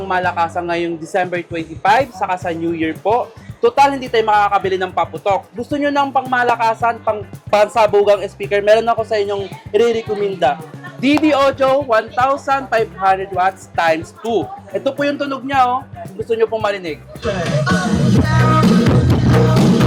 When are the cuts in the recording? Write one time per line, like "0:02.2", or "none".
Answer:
none